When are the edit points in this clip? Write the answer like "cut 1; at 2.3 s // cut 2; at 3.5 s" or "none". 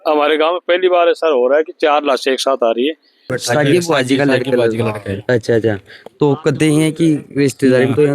cut 1; at 3.4 s